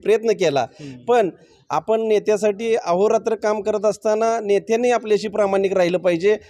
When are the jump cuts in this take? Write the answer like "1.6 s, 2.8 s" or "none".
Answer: none